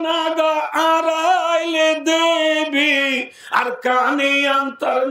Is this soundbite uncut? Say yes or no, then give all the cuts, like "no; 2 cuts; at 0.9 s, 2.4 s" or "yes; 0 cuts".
yes; 0 cuts